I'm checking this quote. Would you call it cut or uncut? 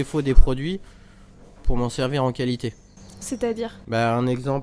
uncut